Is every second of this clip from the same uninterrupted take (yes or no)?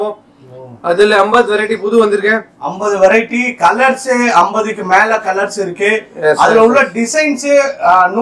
yes